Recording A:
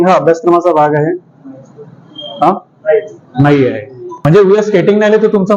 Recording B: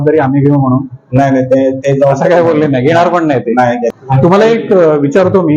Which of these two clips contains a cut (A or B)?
B